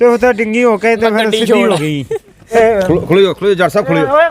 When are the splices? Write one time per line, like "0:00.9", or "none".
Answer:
0:02.5